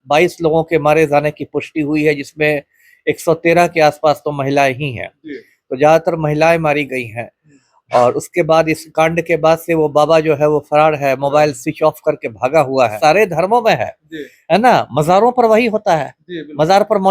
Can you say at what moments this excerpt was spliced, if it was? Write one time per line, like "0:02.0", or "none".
0:12.9